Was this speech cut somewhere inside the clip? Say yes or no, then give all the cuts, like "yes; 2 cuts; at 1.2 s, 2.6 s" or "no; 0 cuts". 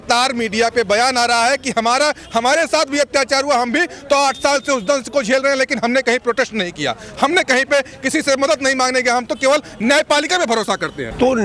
no; 0 cuts